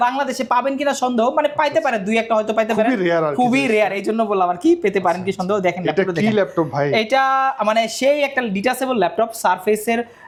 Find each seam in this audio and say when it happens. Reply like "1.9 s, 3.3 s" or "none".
none